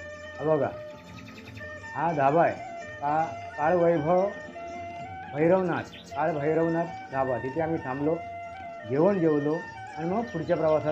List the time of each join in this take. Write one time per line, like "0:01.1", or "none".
none